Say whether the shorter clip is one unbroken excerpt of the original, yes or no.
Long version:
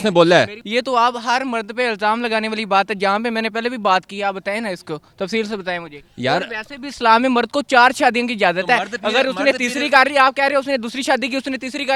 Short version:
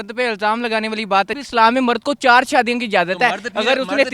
no